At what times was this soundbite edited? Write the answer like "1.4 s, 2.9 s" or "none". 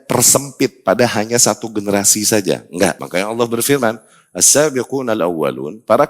3.0 s